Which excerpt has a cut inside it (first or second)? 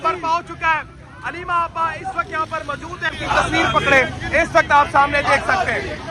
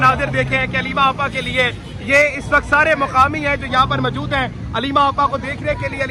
first